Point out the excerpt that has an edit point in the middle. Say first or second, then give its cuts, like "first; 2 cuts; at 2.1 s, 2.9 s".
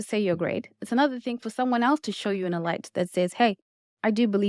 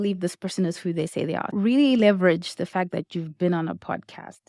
second; 1 cut; at 1.5 s